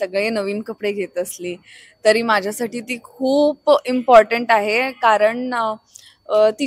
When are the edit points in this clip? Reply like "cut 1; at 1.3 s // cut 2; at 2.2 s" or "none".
none